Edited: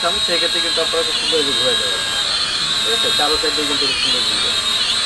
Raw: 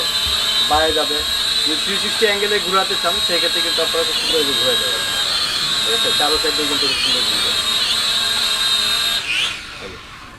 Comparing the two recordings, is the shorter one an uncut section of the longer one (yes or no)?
yes